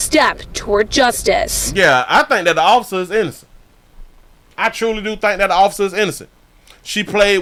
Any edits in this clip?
no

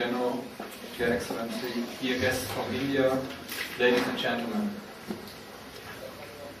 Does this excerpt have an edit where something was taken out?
yes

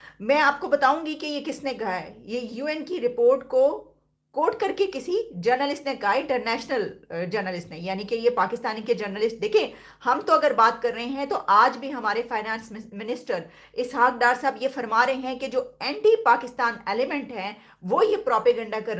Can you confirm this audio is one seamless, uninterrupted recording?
yes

